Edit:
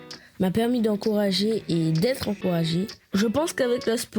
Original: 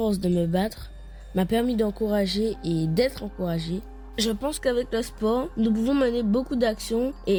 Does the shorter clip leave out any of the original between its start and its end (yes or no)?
yes